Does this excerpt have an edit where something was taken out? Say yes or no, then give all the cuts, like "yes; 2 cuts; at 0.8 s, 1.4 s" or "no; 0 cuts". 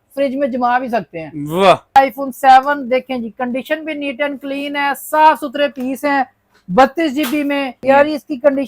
yes; 2 cuts; at 2.0 s, 7.8 s